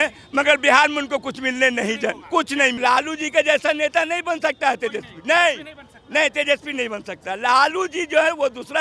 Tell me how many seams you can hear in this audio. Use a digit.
1